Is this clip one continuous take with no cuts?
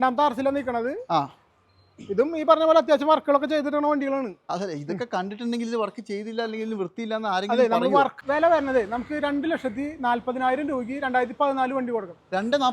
no; 1 cut; at 8.1 s

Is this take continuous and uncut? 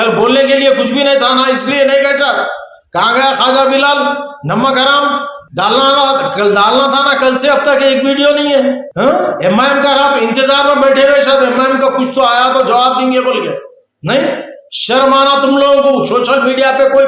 yes; 0 cuts

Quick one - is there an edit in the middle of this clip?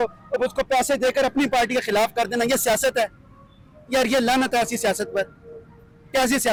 no; 0 cuts

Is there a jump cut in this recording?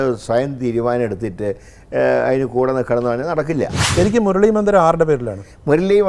yes; 1 cut; at 3.9 s

